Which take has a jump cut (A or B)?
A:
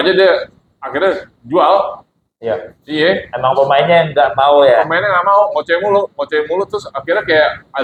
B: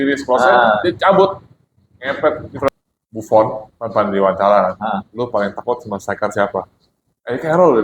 B